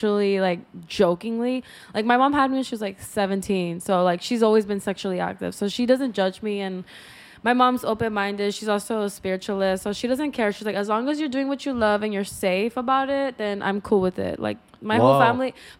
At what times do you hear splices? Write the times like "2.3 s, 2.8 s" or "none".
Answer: none